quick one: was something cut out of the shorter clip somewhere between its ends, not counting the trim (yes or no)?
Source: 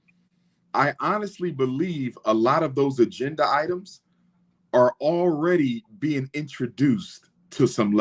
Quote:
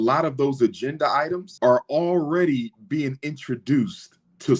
yes